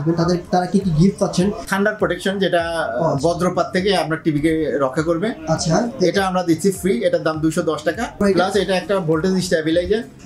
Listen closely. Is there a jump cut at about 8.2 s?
yes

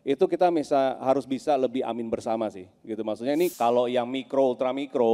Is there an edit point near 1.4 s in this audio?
no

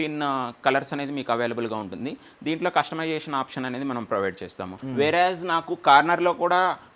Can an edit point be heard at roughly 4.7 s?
yes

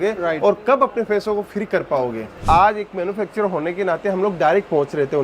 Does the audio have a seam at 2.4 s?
yes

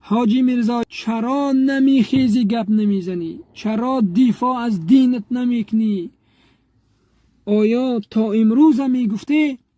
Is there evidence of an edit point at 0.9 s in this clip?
yes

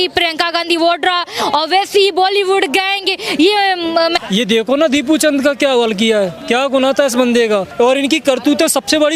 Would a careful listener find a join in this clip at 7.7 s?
yes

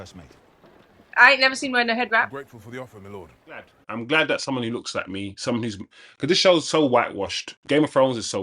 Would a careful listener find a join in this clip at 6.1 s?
no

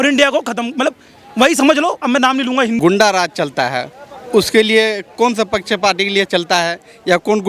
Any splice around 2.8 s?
yes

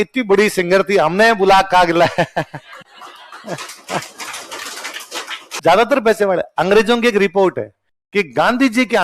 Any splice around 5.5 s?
yes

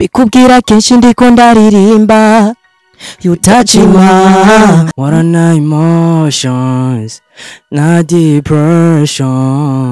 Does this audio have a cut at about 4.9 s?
yes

